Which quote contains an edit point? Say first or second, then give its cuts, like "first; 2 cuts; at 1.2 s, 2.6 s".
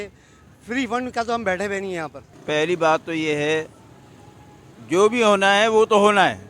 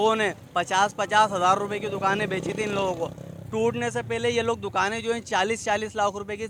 first; 1 cut; at 2.3 s